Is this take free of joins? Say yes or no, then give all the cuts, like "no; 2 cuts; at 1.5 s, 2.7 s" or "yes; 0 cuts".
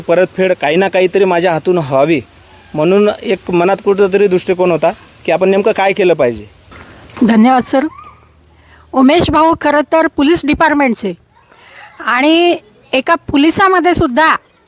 no; 1 cut; at 6.9 s